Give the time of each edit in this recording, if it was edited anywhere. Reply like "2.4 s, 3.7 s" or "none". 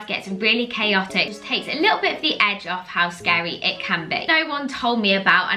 1.4 s, 4.3 s